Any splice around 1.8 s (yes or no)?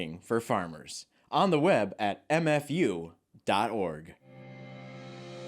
no